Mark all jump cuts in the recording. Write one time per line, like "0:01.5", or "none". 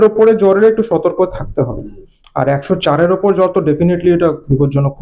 none